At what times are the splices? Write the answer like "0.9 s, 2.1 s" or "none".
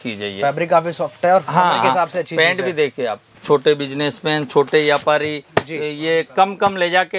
3.3 s